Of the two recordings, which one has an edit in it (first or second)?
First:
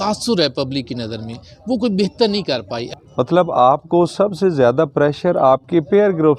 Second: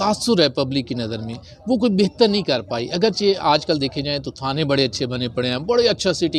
first